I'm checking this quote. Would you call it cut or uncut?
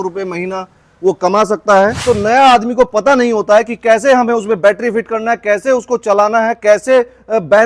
cut